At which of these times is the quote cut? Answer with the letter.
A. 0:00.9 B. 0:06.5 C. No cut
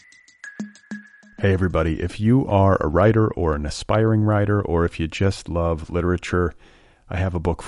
A